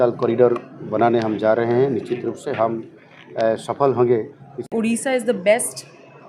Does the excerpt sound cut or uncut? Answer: cut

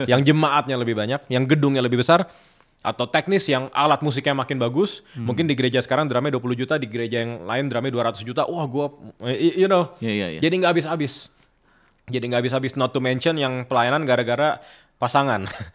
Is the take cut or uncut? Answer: uncut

